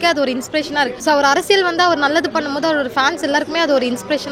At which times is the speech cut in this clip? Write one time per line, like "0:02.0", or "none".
0:01.0